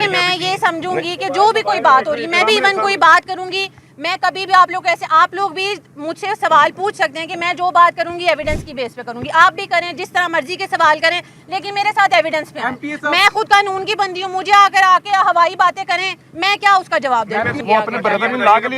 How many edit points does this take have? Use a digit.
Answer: 1